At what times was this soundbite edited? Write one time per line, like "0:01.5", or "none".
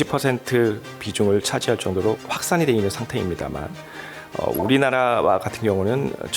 none